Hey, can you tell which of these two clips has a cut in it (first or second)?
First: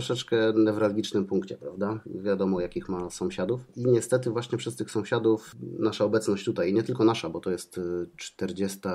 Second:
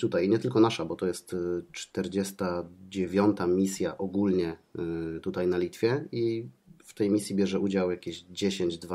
first